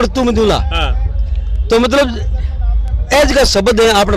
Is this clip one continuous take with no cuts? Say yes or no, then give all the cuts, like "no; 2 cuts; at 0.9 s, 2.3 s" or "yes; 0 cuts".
yes; 0 cuts